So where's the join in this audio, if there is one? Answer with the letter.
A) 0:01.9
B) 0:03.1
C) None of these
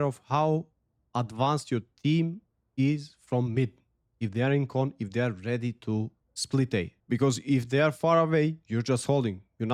C